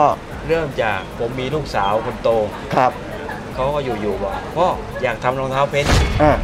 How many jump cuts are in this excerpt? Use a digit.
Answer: 0